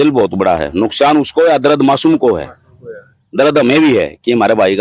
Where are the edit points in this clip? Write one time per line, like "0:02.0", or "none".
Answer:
none